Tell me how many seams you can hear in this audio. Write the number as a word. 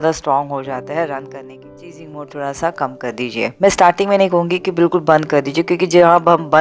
one